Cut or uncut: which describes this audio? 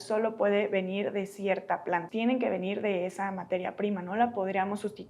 cut